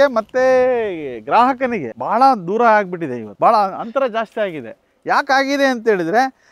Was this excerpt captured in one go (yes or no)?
no